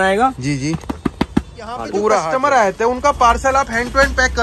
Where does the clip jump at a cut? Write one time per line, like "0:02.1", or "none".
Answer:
0:02.3